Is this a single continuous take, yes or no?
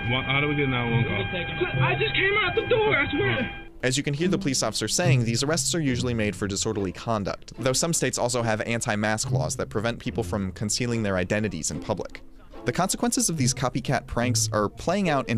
yes